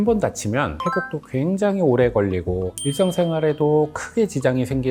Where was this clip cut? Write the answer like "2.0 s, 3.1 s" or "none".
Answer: none